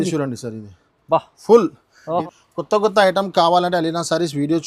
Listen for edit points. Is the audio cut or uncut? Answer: cut